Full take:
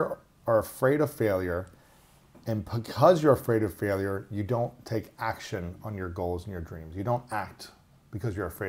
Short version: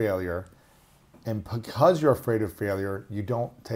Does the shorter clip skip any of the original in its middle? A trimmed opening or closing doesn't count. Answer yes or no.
no